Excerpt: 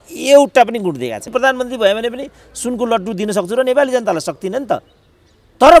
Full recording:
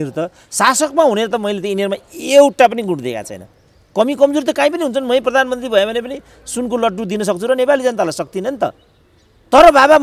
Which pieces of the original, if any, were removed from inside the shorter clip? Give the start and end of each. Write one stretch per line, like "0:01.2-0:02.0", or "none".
0:03.3-0:05.2